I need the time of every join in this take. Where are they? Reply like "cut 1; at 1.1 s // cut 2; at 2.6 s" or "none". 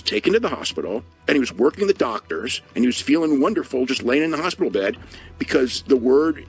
cut 1; at 1.1 s // cut 2; at 2.6 s

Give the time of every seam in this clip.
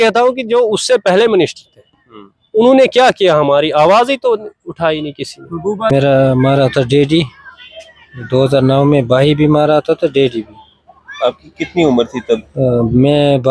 cut 1; at 5.9 s

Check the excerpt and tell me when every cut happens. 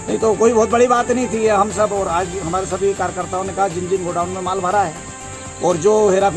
none

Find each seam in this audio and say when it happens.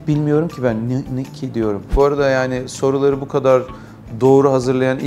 cut 1; at 1.9 s

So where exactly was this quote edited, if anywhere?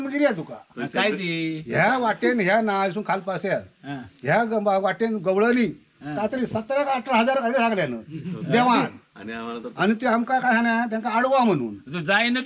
none

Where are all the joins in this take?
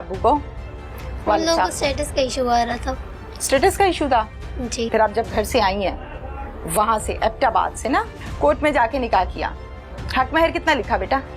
cut 1; at 4.9 s // cut 2; at 8.1 s

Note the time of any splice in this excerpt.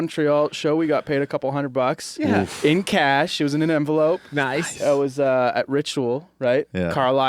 none

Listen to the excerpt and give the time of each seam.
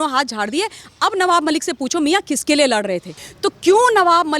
cut 1; at 3.2 s

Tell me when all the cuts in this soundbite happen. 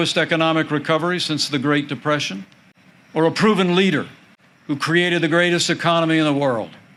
none

